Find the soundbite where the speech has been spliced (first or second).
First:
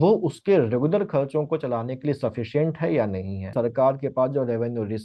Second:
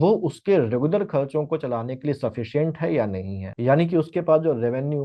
first